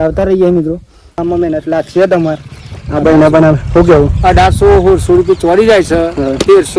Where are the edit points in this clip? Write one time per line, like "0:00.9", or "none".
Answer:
0:01.1